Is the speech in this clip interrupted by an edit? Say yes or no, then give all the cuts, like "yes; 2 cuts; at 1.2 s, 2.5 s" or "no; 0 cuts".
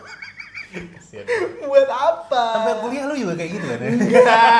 no; 0 cuts